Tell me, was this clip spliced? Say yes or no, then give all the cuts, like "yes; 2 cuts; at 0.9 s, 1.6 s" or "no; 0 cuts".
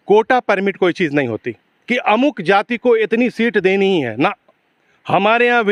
no; 0 cuts